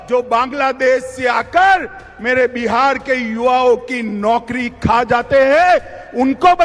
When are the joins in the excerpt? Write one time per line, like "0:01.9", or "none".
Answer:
none